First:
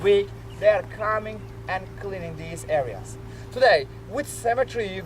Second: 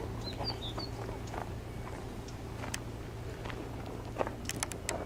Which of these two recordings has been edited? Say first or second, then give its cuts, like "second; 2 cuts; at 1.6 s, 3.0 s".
first; 1 cut; at 1.4 s